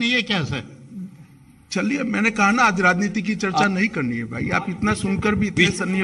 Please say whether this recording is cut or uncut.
uncut